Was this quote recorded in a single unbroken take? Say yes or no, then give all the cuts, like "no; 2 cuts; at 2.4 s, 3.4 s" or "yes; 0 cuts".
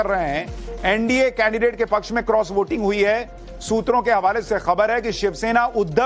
yes; 0 cuts